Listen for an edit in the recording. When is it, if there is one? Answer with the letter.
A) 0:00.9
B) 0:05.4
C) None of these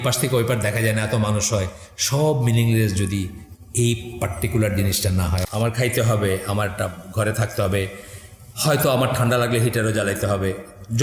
B